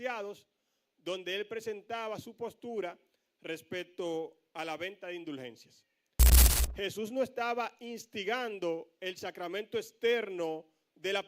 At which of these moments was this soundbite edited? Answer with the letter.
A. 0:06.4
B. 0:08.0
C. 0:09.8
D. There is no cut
A